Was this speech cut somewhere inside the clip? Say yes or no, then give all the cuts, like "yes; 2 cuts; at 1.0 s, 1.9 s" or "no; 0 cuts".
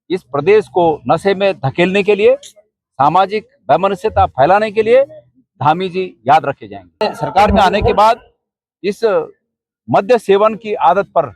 yes; 1 cut; at 7.0 s